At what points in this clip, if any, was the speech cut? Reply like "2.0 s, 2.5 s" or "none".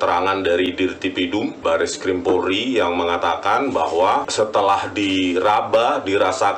1.6 s, 4.3 s